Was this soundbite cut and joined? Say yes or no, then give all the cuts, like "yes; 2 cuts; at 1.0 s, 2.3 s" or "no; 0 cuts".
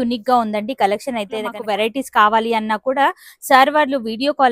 yes; 1 cut; at 1.6 s